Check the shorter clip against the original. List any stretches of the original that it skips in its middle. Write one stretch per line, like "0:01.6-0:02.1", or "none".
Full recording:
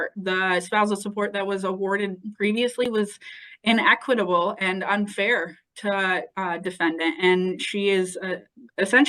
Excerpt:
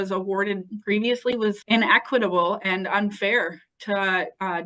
0:03.1-0:03.6